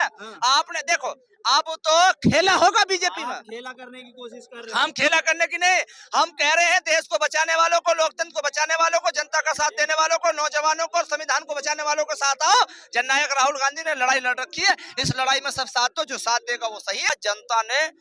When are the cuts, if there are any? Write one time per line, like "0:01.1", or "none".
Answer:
0:17.1